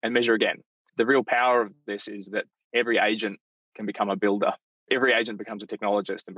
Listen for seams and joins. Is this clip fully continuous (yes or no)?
no